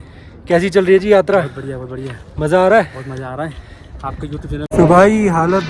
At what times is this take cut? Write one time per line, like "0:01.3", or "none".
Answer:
0:04.5